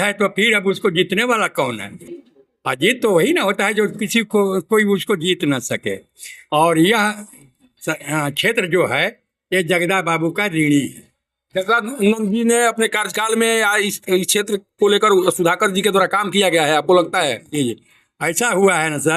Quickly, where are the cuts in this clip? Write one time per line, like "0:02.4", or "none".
none